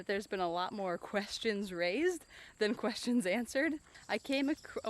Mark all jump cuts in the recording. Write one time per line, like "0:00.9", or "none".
0:03.9